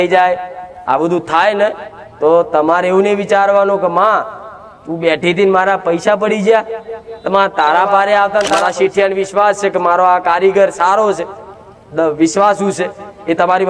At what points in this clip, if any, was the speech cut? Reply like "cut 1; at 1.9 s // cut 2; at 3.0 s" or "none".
cut 1; at 8.5 s